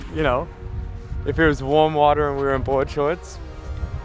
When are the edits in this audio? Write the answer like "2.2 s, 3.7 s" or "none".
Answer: none